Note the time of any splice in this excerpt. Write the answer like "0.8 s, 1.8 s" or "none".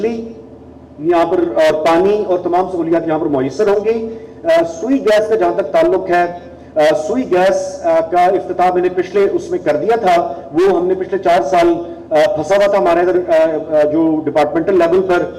none